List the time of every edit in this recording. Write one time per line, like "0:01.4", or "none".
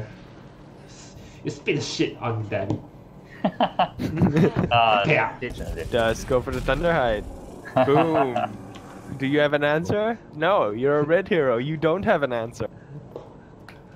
0:05.6

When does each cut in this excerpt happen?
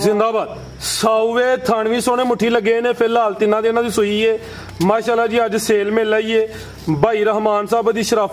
none

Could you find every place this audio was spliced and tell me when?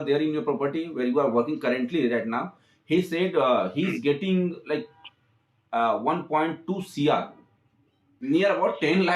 0:08.1

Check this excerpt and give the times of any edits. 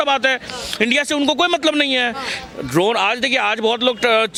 none

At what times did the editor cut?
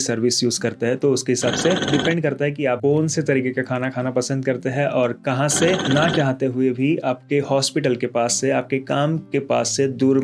0:01.8
0:05.8

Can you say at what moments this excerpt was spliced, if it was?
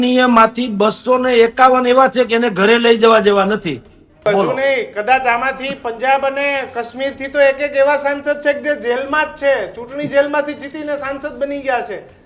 0:04.2

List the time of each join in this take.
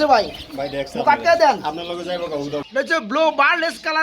0:02.8

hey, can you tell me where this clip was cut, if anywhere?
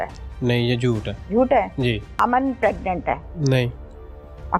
0:01.1
0:02.1
0:03.3

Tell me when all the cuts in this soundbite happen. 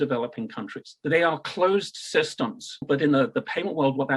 0:00.9
0:02.8

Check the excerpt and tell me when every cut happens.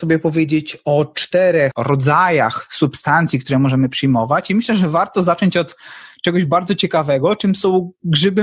0:01.8

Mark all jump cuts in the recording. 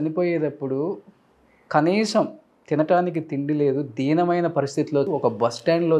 0:05.1

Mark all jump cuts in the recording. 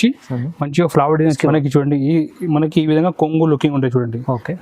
0:01.4

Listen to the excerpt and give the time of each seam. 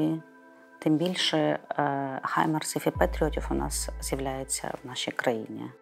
none

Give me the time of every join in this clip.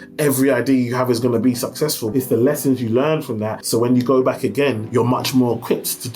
0:02.0
0:03.6
0:04.8

